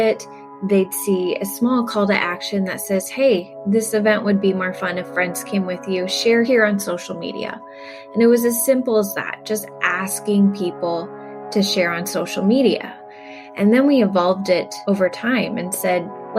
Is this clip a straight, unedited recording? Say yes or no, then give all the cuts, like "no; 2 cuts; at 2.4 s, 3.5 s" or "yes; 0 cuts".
no; 1 cut; at 6.5 s